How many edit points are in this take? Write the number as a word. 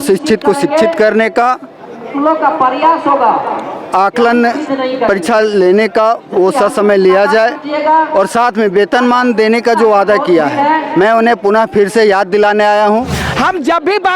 one